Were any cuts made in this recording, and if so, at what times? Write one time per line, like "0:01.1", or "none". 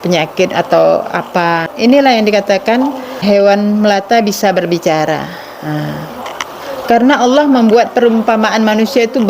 0:01.7
0:03.2
0:06.2